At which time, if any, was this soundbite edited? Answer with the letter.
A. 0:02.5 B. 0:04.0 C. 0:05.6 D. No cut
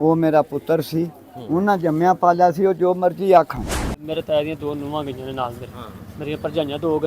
B